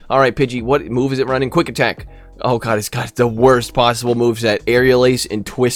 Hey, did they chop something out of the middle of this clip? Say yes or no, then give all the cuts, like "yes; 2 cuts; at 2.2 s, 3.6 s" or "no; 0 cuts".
no; 0 cuts